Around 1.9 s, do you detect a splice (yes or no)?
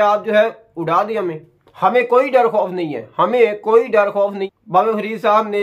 no